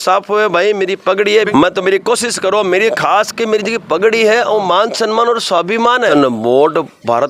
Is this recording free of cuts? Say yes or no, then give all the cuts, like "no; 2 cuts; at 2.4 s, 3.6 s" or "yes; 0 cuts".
no; 2 cuts; at 1.5 s, 6.1 s